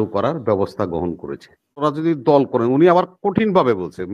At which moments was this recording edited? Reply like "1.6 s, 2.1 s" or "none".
1.8 s